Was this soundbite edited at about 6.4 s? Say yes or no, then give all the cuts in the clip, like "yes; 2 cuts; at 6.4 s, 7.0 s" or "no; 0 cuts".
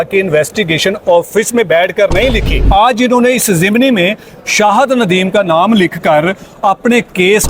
no; 1 cut; at 2.5 s